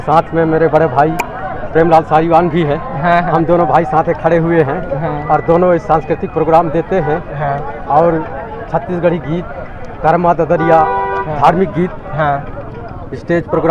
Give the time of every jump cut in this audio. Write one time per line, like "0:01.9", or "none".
none